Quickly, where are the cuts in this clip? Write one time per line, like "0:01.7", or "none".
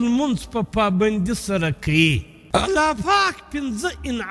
0:02.3